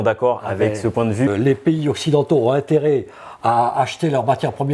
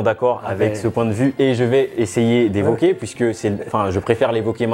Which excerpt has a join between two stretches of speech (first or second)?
first